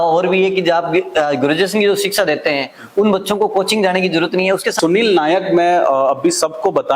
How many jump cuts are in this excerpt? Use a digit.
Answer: 1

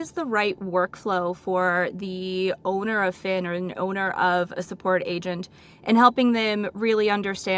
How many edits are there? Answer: 0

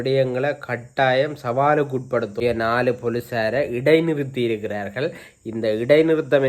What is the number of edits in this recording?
1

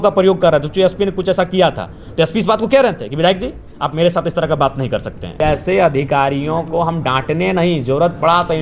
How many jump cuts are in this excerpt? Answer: 1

